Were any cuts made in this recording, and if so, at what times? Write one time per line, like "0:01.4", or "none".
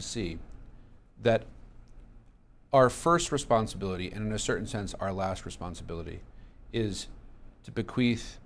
none